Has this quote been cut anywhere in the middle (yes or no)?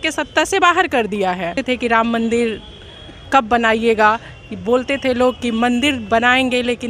yes